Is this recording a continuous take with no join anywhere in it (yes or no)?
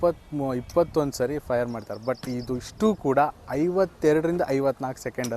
yes